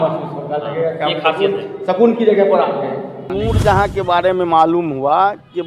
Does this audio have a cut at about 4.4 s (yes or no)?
no